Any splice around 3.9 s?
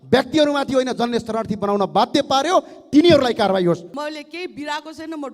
yes; 1 cut; at 3.9 s

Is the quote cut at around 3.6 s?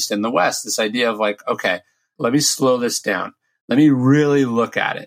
no; 1 cut; at 2.1 s

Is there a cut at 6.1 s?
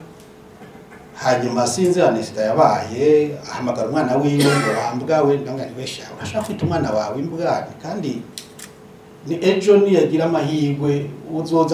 no; 0 cuts

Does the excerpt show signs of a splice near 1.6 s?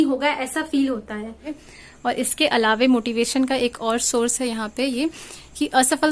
yes; 1 cut; at 1.6 s

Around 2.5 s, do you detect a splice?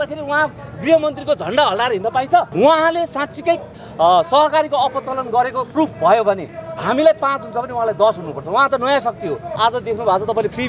yes; 2 cuts; at 2.5 s, 9.6 s

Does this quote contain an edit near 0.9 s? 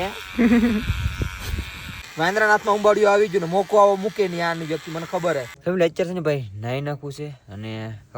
no; 0 cuts

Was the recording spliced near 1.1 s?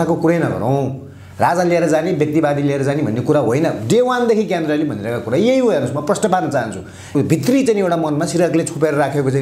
no; 1 cut; at 7.1 s

